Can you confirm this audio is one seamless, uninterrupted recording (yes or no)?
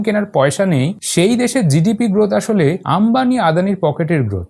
no